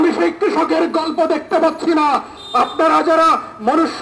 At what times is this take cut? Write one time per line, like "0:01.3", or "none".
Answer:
none

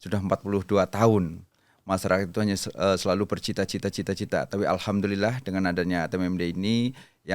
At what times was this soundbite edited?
none

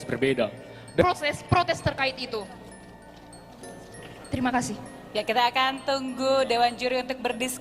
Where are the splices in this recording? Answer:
none

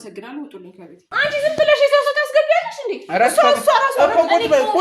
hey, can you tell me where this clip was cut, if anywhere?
0:01.1

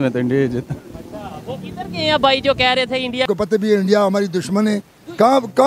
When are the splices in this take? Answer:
0:03.2

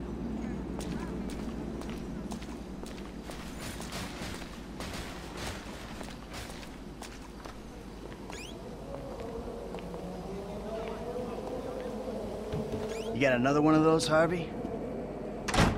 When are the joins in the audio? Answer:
0:07.6

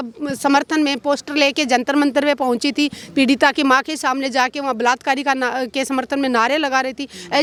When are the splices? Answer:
none

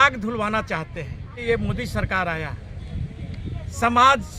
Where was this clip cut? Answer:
0:01.4

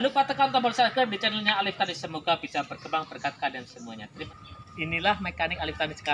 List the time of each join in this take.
0:04.2

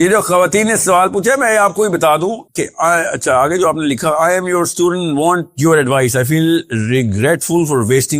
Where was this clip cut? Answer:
none

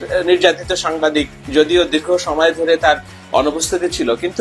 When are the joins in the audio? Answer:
0:01.4

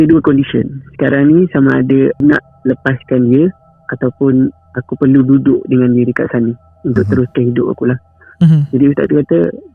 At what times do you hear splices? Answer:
0:02.2

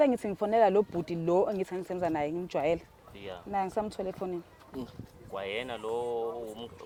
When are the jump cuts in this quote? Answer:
none

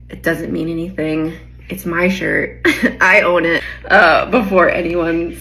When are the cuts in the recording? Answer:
0:03.6

